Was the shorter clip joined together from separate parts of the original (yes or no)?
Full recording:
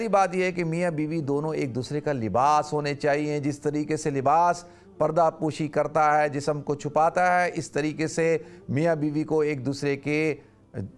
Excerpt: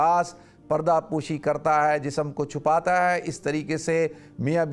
no